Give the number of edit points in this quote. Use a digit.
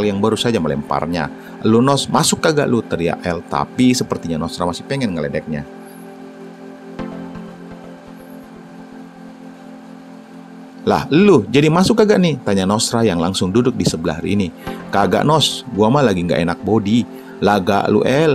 2